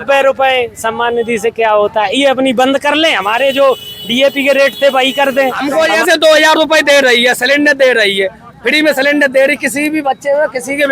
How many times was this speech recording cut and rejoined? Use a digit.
1